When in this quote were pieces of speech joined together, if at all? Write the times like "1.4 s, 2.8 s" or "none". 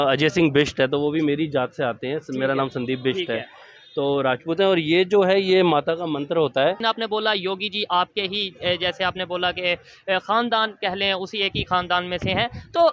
6.8 s

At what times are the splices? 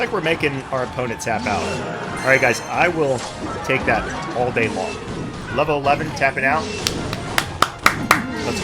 2.2 s

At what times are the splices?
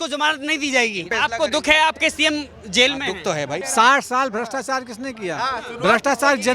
1.1 s, 3.7 s

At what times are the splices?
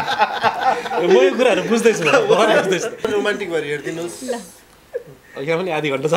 3.1 s

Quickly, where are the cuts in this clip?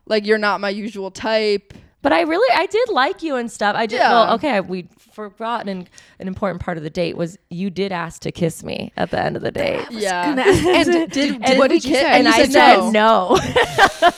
none

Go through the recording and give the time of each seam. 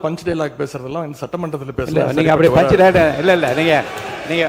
none

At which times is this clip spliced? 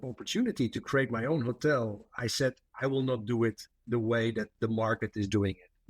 none

